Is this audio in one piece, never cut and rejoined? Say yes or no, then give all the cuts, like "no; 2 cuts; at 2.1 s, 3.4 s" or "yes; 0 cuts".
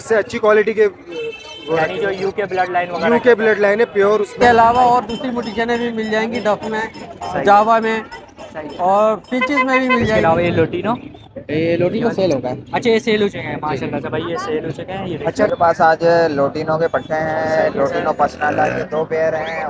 no; 3 cuts; at 4.3 s, 10.2 s, 15.3 s